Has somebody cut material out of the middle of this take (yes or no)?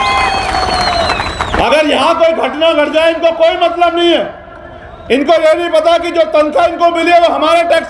yes